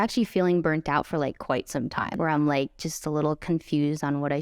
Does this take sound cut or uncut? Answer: cut